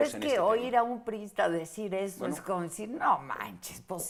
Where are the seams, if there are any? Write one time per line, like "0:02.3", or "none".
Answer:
none